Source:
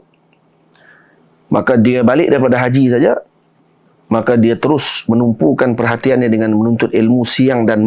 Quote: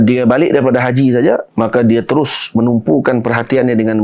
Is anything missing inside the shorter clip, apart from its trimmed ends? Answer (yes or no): yes